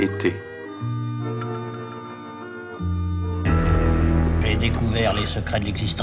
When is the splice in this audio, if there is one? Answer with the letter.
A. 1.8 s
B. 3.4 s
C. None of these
B